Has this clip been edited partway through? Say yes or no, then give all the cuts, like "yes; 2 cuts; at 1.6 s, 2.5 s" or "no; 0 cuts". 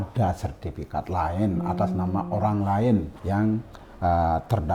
yes; 1 cut; at 3.5 s